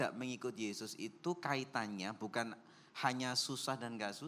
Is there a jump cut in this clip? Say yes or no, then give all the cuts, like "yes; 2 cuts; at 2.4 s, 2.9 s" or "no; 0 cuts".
no; 0 cuts